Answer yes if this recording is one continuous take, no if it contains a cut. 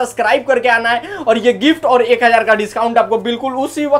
yes